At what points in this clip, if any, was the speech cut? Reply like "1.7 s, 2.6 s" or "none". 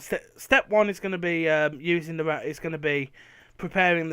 2.6 s